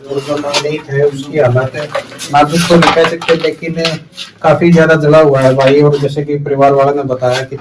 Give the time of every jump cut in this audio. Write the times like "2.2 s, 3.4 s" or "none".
none